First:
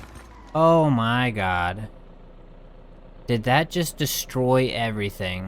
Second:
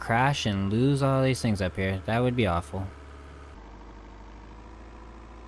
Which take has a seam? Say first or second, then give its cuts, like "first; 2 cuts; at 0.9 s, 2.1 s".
second; 1 cut; at 3.5 s